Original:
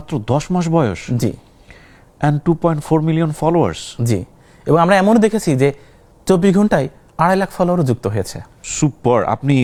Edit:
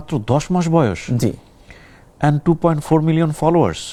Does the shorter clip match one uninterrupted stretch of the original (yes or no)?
yes